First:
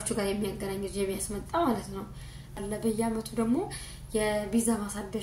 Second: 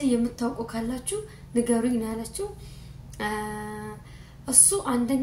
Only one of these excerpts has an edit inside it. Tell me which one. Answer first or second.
first